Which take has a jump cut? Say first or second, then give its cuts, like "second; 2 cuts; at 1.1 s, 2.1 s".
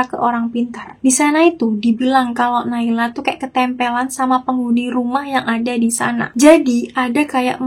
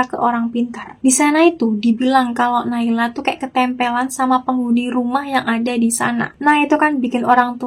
first; 1 cut; at 6.3 s